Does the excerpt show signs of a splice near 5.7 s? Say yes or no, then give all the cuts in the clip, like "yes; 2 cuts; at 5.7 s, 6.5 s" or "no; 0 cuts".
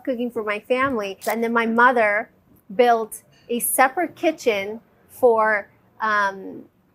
no; 1 cut; at 1.2 s